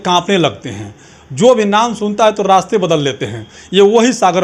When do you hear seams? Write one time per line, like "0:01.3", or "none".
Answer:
none